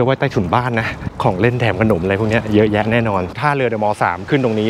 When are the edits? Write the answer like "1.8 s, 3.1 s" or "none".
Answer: 1.1 s, 3.4 s